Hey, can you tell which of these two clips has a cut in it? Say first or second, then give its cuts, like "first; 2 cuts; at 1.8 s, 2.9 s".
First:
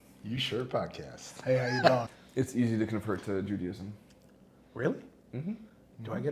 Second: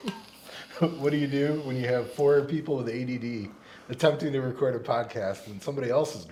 first; 1 cut; at 2.2 s